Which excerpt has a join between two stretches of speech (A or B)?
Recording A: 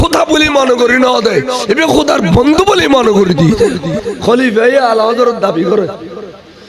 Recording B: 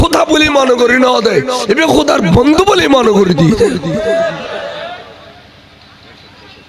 A